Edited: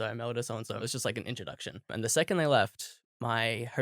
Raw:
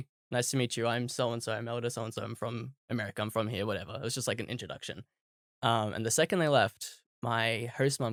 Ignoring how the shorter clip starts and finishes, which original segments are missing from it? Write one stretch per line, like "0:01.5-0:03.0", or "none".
0:02.3-0:04.0
0:05.1-0:05.9